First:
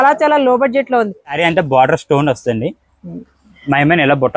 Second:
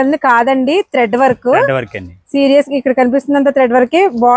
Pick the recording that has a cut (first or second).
first